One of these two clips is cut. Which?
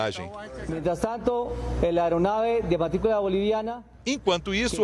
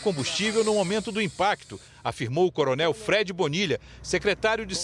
first; 1 cut; at 3.2 s

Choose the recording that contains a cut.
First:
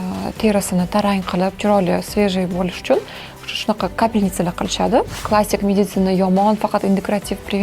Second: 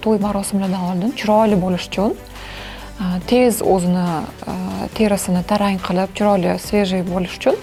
first; 1 cut; at 5.2 s

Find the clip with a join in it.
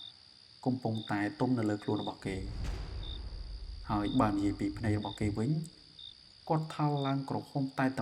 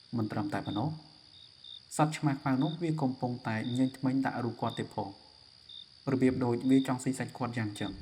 first; 2 cuts; at 2.5 s, 3.7 s

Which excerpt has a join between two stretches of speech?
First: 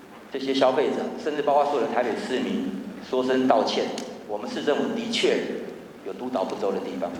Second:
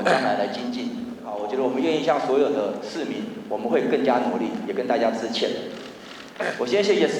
second; 1 cut; at 1.3 s

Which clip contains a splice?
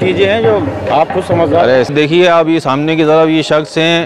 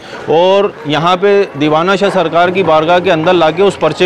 first; 1 cut; at 1.9 s

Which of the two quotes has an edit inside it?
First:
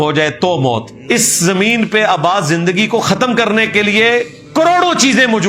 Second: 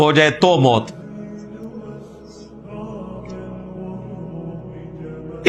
first; 1 cut; at 0.9 s

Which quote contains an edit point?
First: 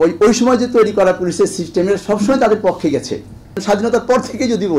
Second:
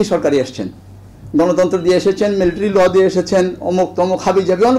first; 1 cut; at 3.6 s

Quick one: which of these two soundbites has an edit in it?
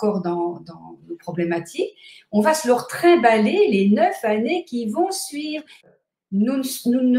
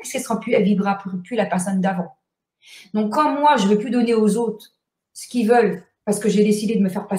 first; 1 cut; at 5.9 s

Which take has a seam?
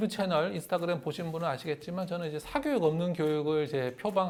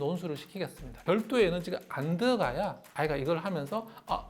second; 2 cuts; at 1.0 s, 2.8 s

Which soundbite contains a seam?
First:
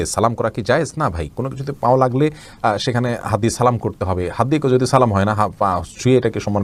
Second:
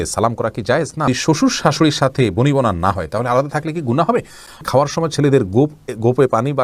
second; 2 cuts; at 1.1 s, 4.5 s

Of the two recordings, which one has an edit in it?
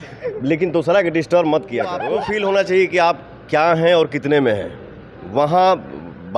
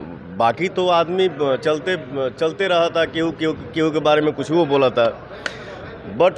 first; 1 cut; at 2.0 s

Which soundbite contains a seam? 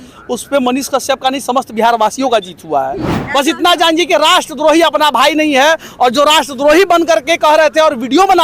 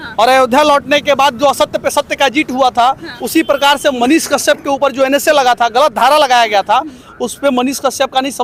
first; 1 cut; at 3.1 s

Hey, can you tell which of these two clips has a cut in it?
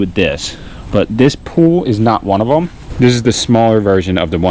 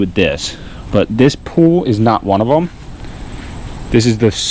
first; 1 cut; at 2.8 s

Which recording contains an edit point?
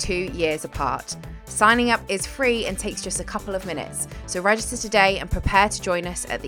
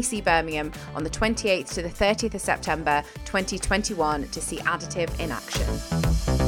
second; 1 cut; at 5.5 s

